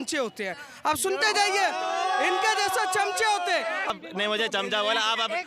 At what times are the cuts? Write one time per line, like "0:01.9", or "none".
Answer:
0:03.9